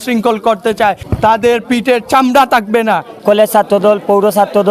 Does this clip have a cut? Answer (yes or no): yes